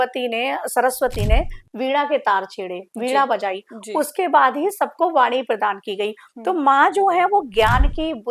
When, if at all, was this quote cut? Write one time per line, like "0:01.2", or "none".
none